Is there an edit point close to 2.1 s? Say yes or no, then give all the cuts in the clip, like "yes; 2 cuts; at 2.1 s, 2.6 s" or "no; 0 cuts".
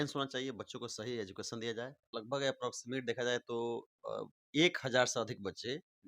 yes; 1 cut; at 2.1 s